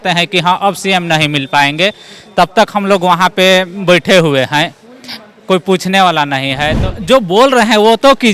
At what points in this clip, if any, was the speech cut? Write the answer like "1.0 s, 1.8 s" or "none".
6.8 s

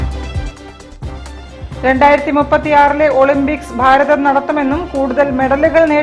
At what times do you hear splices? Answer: 1.3 s

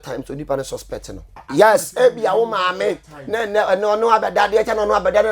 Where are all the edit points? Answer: 1.4 s

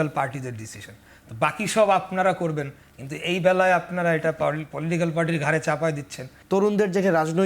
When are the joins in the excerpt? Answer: 6.3 s

